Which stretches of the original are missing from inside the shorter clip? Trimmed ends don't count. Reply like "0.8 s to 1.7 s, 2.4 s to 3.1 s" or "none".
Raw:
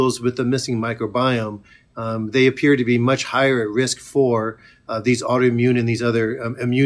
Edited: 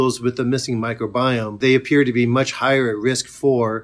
1.6 s to 2.3 s